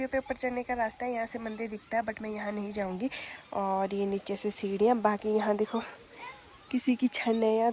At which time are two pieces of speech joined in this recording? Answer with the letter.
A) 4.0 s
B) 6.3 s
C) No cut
C